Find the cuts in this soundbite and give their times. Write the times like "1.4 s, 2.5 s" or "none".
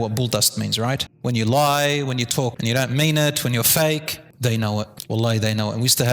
1.1 s, 2.6 s, 4.7 s